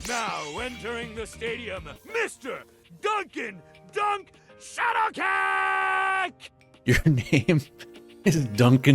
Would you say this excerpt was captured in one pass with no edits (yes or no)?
no